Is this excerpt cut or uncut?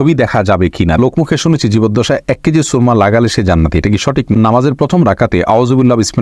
cut